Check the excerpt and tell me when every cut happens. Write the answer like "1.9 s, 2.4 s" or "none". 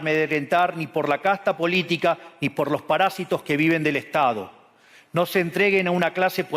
none